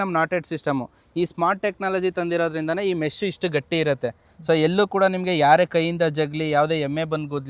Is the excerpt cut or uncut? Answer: uncut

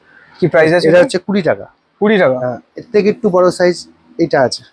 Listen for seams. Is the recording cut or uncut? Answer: uncut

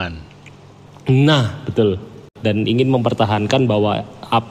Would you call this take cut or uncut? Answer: cut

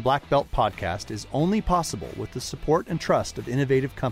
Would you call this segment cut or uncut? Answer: uncut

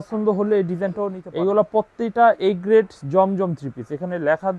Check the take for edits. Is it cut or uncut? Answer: cut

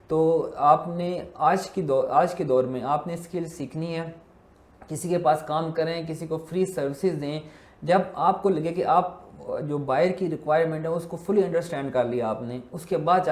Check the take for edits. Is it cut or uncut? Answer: uncut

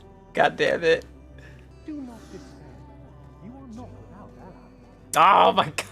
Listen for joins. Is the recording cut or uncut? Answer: cut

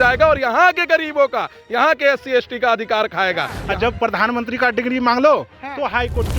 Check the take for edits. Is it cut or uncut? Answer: cut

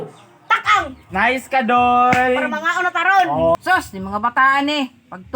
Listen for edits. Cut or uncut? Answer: cut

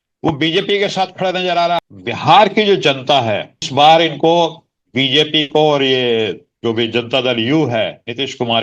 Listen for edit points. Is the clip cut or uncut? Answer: cut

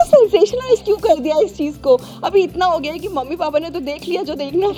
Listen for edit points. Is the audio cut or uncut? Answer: uncut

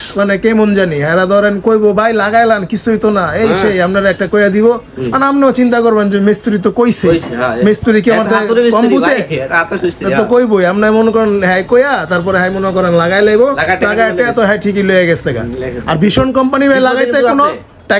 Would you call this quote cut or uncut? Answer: uncut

